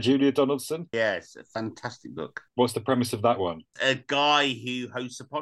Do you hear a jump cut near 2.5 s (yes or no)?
yes